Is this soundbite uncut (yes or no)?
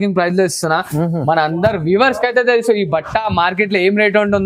yes